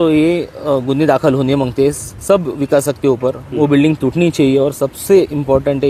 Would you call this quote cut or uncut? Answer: uncut